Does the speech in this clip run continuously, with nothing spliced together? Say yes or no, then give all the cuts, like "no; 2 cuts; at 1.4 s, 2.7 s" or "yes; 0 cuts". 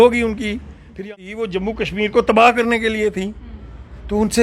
no; 1 cut; at 1.1 s